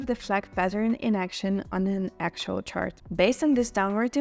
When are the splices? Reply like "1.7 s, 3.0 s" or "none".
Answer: 3.0 s